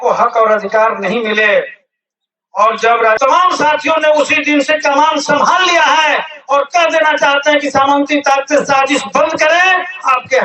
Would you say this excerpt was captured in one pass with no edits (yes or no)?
no